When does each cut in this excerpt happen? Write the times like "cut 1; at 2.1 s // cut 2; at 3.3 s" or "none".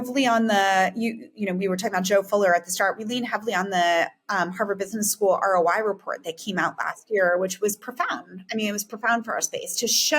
none